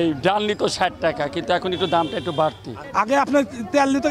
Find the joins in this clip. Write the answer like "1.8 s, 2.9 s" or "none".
2.8 s